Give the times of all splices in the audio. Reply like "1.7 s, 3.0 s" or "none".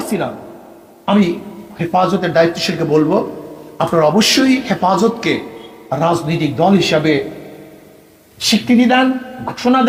none